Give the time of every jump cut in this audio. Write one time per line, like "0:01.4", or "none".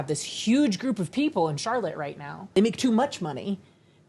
0:02.5

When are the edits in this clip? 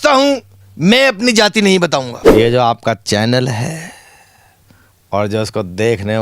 0:02.2

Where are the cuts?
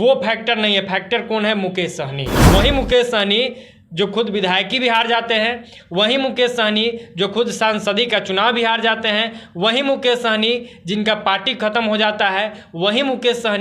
0:02.4

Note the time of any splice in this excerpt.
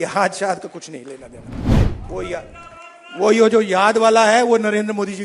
none

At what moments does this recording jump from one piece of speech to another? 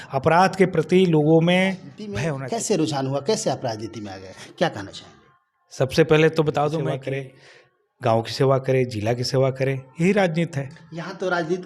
0:02.1
0:06.9

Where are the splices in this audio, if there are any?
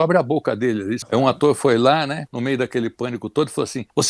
0:01.0

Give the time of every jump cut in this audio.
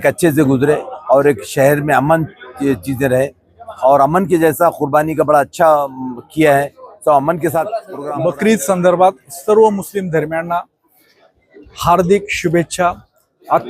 0:07.9

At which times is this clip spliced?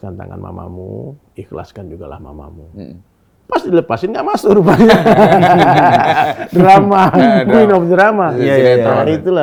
none

